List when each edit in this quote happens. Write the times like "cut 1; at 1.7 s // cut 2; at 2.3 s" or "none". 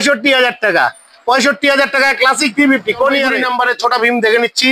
cut 1; at 3.4 s